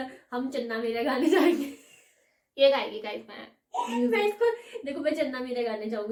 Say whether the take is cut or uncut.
uncut